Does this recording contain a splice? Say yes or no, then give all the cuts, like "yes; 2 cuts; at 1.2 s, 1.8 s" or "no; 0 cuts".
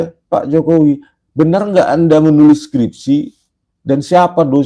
no; 0 cuts